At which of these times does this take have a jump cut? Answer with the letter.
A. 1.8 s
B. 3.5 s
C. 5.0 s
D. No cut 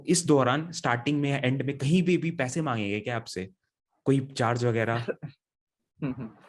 D